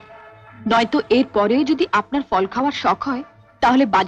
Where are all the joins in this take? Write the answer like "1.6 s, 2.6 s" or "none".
none